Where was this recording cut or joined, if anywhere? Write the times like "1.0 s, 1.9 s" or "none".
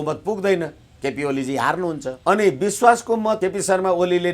2.2 s, 3.4 s